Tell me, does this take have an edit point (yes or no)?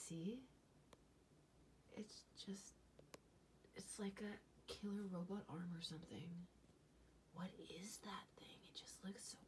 no